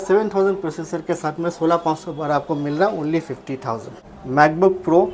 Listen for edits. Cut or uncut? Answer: cut